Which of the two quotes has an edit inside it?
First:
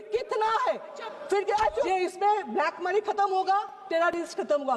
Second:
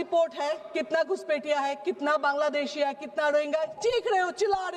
first; 1 cut; at 1.9 s

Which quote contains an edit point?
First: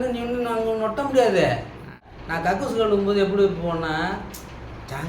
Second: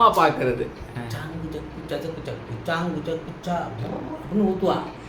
first; 1 cut; at 2.2 s

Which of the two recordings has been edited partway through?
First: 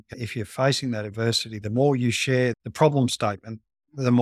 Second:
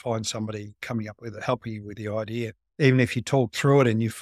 second; 1 cut; at 2.6 s

